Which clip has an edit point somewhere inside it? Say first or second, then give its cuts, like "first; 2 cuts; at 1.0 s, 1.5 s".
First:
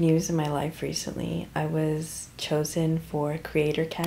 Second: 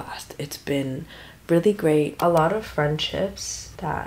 second; 1 cut; at 2.1 s